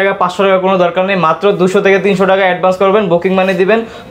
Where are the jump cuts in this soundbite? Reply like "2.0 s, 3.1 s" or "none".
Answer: none